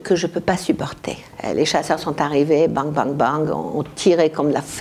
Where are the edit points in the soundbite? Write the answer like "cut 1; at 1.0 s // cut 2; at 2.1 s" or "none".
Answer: cut 1; at 1.2 s